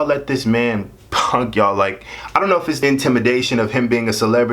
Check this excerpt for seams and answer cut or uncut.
cut